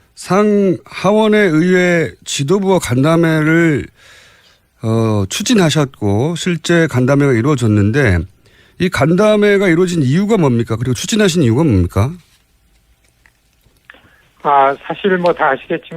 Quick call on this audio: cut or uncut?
uncut